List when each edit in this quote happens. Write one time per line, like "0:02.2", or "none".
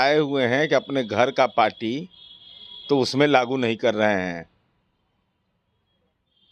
none